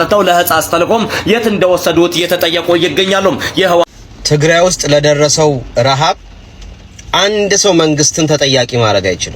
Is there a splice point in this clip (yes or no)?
yes